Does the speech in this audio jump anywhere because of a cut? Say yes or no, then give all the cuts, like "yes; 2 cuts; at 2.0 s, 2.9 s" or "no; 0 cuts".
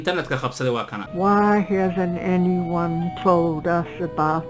yes; 1 cut; at 1.0 s